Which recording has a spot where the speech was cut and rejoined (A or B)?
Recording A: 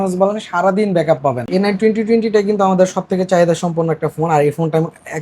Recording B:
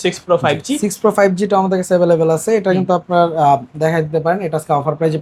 A